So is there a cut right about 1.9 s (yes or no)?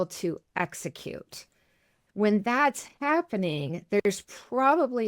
yes